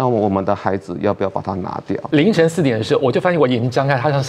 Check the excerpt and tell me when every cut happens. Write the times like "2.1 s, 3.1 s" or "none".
2.0 s